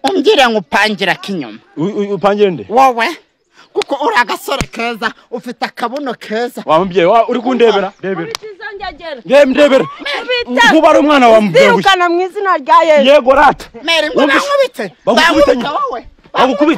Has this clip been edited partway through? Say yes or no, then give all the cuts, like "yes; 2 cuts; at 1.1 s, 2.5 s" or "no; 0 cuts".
no; 0 cuts